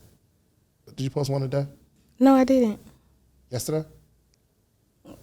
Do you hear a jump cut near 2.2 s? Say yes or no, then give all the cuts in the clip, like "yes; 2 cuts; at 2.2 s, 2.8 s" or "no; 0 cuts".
no; 1 cut; at 0.9 s